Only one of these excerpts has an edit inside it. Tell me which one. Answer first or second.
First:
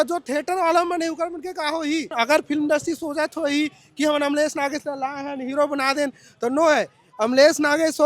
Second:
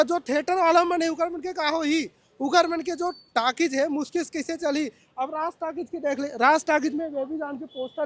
first